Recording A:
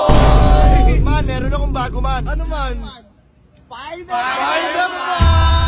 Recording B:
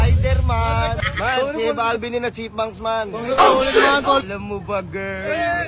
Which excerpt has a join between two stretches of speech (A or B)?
B